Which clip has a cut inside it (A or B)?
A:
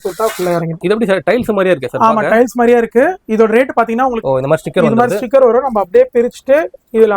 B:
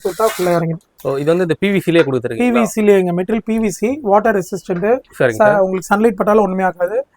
A